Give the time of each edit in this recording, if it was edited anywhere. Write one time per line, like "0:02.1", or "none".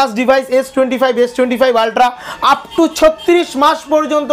none